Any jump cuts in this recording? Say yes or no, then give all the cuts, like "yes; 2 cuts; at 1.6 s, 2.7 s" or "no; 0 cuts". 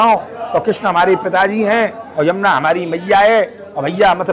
no; 0 cuts